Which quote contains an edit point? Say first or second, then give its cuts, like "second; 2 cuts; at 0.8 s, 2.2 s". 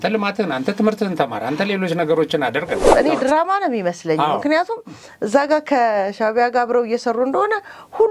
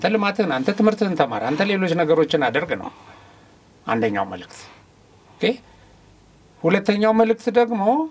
first; 1 cut; at 2.9 s